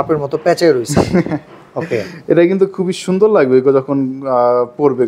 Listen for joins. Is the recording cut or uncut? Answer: uncut